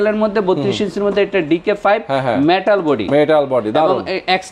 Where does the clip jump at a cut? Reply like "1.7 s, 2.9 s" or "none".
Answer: none